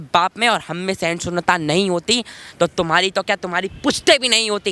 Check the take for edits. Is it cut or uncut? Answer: uncut